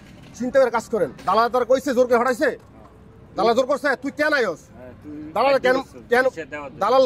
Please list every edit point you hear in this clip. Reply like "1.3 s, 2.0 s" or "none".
1.2 s